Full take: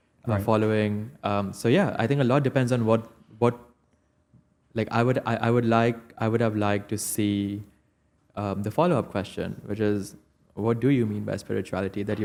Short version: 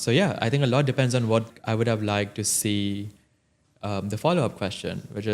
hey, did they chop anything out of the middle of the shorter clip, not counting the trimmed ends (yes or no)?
yes